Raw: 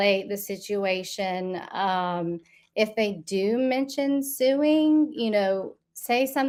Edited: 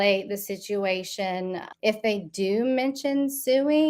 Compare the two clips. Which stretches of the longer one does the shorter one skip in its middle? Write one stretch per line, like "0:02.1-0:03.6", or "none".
0:01.6-0:02.6